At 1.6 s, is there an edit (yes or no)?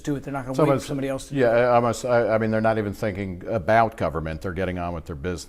no